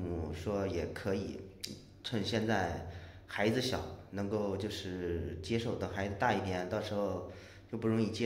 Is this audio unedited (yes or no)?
yes